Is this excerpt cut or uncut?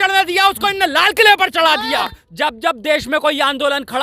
cut